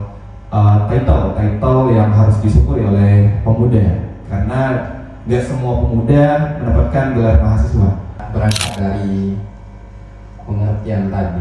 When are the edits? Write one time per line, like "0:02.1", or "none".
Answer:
0:08.2